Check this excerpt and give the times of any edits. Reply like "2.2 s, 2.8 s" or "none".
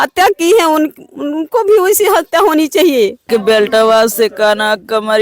3.3 s

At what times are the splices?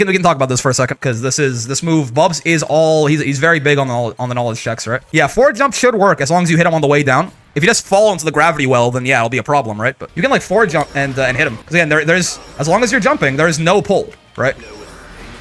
1.0 s, 5.0 s, 10.0 s, 11.6 s

